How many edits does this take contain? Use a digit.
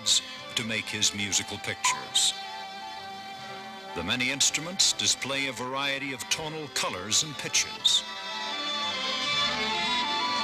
1